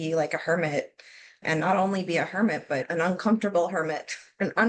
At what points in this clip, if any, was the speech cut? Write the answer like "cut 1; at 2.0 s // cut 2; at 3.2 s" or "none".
none